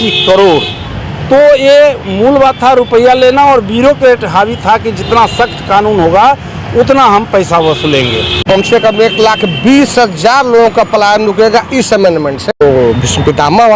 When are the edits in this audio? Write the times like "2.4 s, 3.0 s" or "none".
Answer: 8.4 s, 12.6 s